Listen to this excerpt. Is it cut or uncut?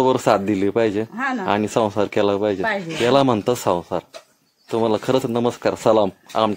uncut